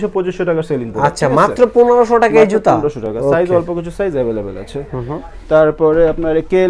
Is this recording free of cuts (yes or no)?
yes